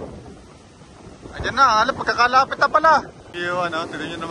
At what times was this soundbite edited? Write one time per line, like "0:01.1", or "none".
0:03.3

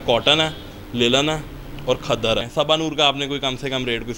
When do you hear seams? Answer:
0:02.5

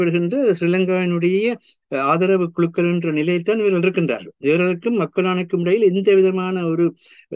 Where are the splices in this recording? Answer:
none

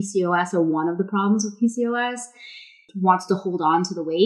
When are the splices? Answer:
0:02.9

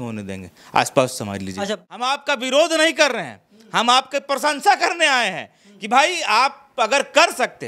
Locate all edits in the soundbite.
0:01.6

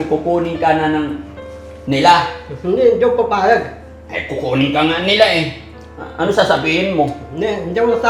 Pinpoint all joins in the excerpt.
none

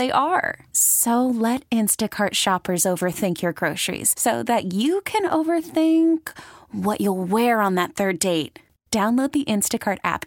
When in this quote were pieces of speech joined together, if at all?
none

